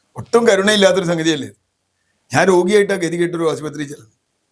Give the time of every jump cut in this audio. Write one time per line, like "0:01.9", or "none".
none